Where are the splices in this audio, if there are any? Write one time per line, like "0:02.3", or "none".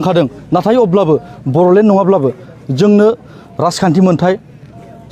none